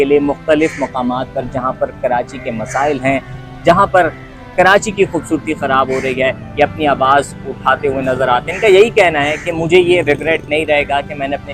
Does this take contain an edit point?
no; 0 cuts

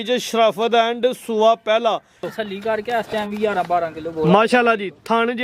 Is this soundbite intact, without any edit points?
no; 1 cut; at 2.3 s

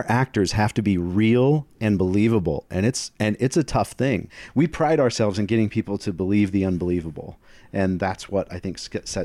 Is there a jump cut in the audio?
yes; 1 cut; at 4.4 s

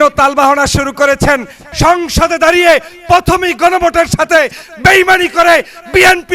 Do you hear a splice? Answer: yes; 1 cut; at 1.6 s

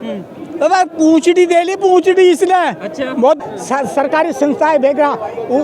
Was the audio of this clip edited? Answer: yes; 1 cut; at 3.4 s

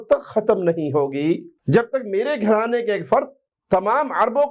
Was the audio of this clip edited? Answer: no; 0 cuts

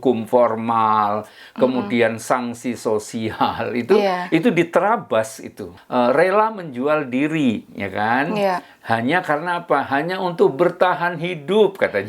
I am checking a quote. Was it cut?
yes; 1 cut; at 5.7 s

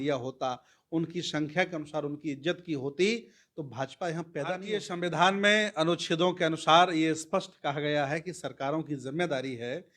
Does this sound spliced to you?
yes; 1 cut; at 4.8 s

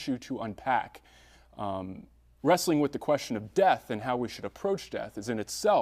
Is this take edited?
yes; 1 cut; at 4.3 s

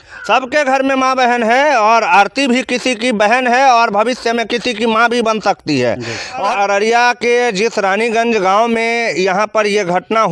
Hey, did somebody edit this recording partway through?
yes; 1 cut; at 6.4 s

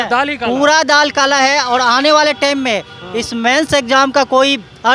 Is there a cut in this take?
no; 0 cuts

